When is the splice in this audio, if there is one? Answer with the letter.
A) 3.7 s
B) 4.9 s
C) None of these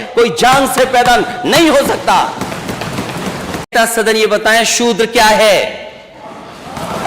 A